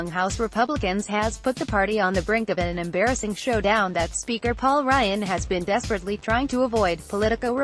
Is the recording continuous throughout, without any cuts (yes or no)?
yes